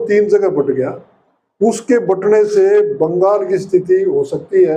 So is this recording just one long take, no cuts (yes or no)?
yes